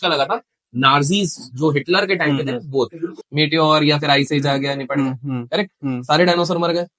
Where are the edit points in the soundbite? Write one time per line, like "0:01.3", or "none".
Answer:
0:03.2